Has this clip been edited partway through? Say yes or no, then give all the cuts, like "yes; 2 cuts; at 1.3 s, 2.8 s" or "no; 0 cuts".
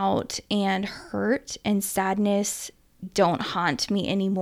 yes; 1 cut; at 3.0 s